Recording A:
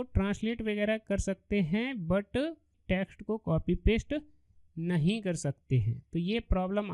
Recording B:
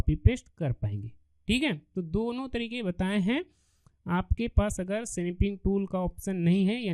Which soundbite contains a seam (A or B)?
A